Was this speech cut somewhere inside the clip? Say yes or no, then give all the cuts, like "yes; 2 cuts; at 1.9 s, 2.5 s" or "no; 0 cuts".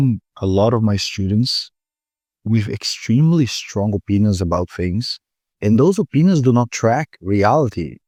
no; 0 cuts